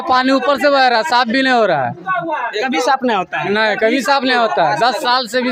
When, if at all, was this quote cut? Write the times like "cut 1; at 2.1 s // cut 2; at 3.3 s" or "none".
none